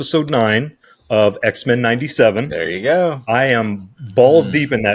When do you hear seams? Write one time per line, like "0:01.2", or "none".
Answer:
none